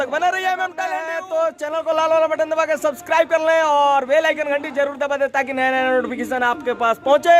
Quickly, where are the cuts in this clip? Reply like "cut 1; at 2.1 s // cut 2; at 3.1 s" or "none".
cut 1; at 1.1 s

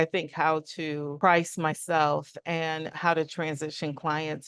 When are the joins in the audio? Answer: cut 1; at 1.1 s // cut 2; at 2.9 s

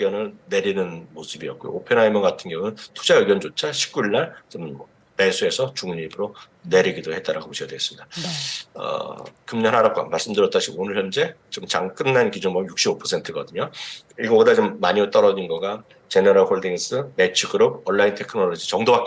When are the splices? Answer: none

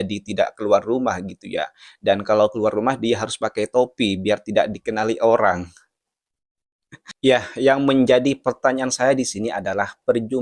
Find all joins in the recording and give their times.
cut 1; at 7.0 s

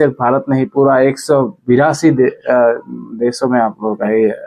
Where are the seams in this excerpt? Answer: none

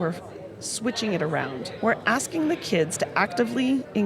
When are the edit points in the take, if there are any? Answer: cut 1; at 1.7 s

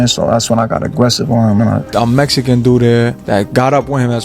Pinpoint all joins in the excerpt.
cut 1; at 1.8 s

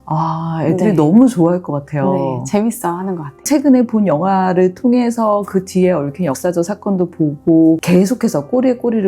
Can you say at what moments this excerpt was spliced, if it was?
cut 1; at 3.4 s // cut 2; at 7.8 s

